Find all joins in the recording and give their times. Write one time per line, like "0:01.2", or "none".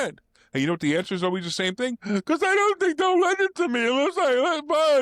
none